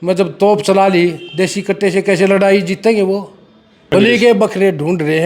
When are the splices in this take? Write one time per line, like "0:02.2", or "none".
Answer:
0:03.9